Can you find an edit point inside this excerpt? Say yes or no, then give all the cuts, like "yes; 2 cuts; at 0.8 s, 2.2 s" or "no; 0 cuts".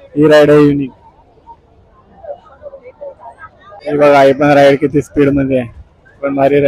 yes; 1 cut; at 3.8 s